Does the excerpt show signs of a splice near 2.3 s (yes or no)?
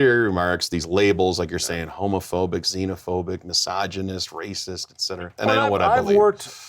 no